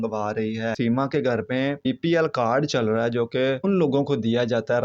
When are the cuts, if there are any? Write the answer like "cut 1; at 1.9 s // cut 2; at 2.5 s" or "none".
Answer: cut 1; at 0.7 s // cut 2; at 1.8 s // cut 3; at 3.6 s